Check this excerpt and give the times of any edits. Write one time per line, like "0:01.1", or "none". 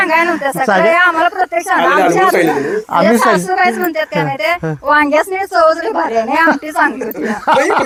none